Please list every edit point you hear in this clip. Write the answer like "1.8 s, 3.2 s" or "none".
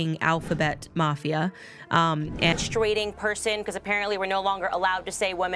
2.6 s